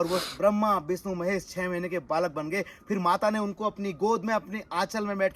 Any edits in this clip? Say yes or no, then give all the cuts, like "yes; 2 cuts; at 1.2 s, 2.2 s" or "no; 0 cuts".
no; 0 cuts